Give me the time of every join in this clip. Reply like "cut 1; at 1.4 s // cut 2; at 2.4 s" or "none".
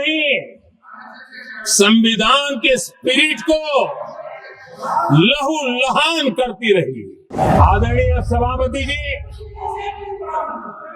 cut 1; at 7.3 s